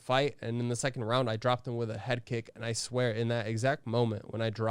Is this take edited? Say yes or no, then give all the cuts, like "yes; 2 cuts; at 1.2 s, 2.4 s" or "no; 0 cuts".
no; 0 cuts